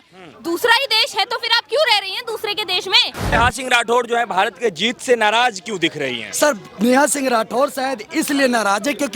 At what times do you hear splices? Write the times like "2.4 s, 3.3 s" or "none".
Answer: 3.3 s